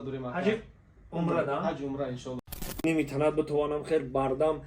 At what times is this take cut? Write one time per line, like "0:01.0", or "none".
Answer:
0:02.8